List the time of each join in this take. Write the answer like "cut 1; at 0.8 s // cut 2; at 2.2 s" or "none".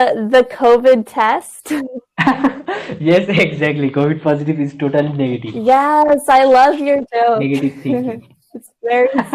none